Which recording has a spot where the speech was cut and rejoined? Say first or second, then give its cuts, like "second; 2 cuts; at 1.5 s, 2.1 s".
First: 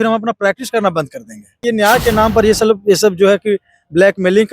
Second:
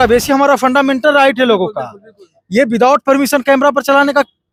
first; 1 cut; at 1.6 s